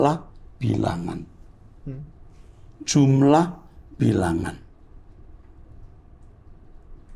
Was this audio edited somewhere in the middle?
no; 0 cuts

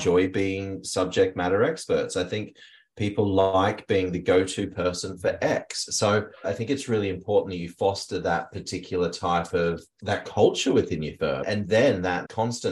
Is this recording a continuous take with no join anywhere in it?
no; 3 cuts; at 6.4 s, 9.9 s, 11.4 s

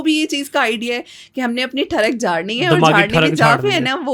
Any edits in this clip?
no; 0 cuts

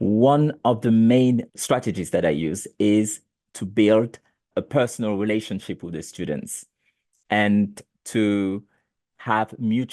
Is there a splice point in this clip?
yes; 3 cuts; at 1.5 s, 4.5 s, 9.0 s

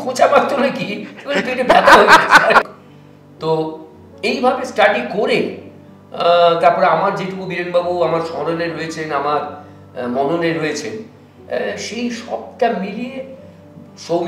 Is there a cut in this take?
yes; 1 cut; at 2.7 s

